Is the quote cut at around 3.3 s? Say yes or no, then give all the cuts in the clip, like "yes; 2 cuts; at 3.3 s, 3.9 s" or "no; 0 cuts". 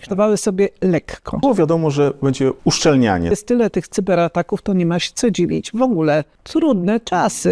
yes; 4 cuts; at 1.4 s, 2.6 s, 3.3 s, 6.4 s